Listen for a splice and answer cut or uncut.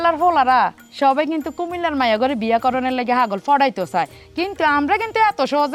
uncut